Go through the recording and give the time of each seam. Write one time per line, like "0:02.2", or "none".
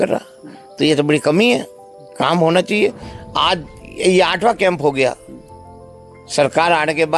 none